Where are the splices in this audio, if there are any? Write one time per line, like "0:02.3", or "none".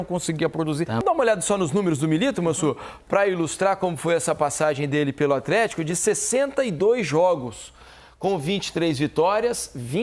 0:01.0